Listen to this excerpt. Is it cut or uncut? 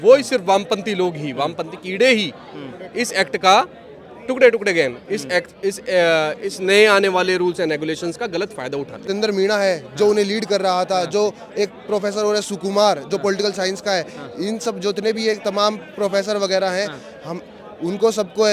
cut